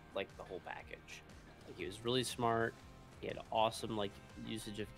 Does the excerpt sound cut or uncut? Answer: uncut